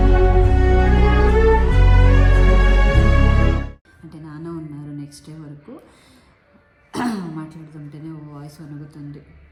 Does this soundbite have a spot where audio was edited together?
no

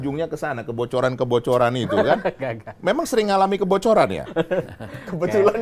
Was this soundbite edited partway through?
no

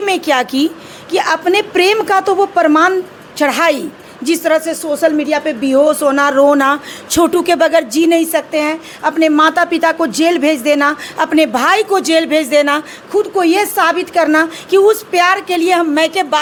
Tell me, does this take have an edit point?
no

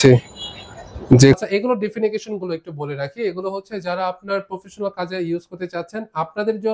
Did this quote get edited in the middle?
no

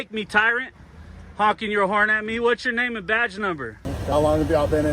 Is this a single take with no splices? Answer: no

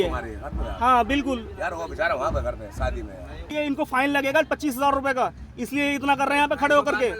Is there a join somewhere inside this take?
yes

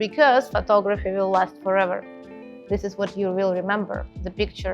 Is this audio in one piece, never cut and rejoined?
yes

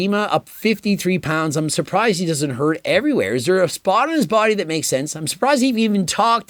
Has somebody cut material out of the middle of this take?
no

